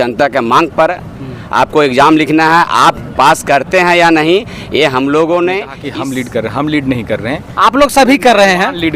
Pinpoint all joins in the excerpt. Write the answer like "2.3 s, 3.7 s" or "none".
5.8 s